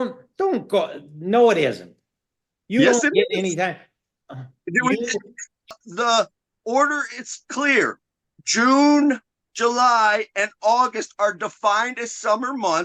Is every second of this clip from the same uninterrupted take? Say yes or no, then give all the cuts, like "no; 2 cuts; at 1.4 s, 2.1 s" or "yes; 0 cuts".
no; 1 cut; at 5.8 s